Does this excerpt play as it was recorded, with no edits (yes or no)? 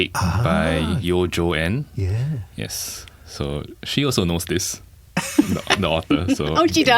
no